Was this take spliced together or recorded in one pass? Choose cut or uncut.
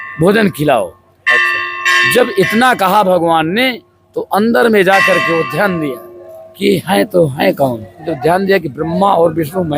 cut